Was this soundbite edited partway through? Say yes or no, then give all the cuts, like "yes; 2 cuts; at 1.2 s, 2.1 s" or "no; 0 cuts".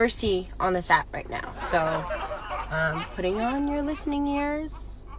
yes; 1 cut; at 1.5 s